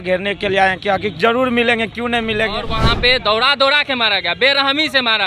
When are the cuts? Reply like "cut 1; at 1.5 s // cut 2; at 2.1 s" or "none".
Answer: cut 1; at 2.8 s